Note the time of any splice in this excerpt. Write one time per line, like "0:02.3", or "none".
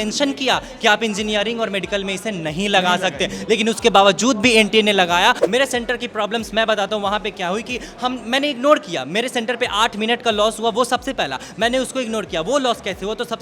0:05.4